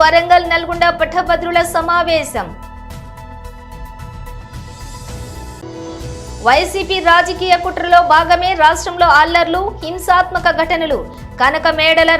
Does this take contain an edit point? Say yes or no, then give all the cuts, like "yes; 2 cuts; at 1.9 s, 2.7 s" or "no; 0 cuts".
yes; 3 cuts; at 2.6 s, 4.4 s, 6.3 s